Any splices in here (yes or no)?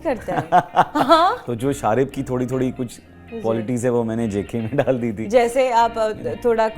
yes